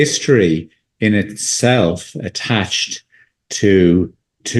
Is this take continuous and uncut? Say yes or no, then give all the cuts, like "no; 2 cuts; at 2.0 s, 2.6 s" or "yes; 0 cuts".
yes; 0 cuts